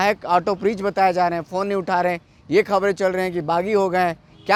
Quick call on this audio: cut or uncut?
uncut